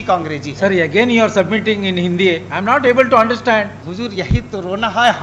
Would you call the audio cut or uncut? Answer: cut